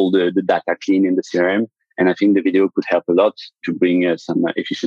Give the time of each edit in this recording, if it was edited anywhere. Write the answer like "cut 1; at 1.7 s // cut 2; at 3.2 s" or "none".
cut 1; at 3.6 s